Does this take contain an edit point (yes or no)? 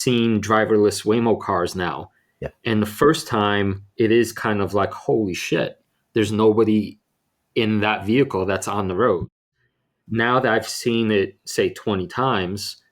no